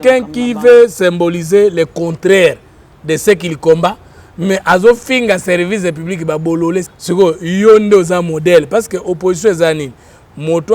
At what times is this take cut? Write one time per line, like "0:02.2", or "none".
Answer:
0:06.9